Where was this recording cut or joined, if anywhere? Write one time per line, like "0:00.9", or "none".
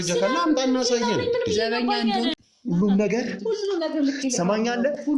0:02.4